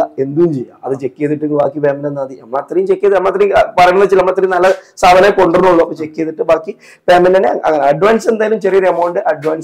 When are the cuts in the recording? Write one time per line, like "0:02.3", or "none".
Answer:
none